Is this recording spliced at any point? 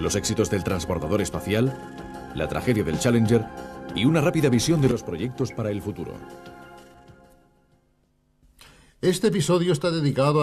yes; 1 cut; at 3.5 s

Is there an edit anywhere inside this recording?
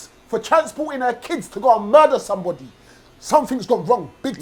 no; 0 cuts

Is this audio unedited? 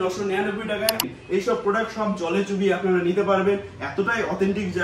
no; 1 cut; at 1.1 s

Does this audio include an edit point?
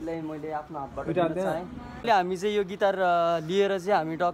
no; 0 cuts

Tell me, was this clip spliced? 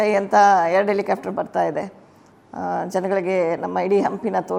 no; 0 cuts

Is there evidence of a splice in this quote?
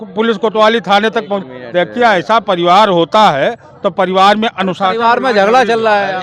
no; 0 cuts

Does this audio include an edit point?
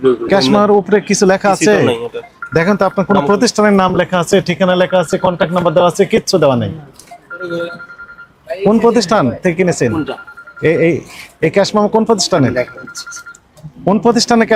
no; 0 cuts

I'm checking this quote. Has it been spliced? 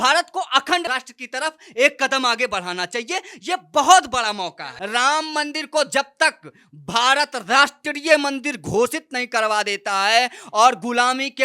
yes; 1 cut; at 4.7 s

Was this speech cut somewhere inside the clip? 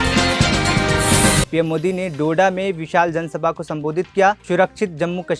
no; 0 cuts

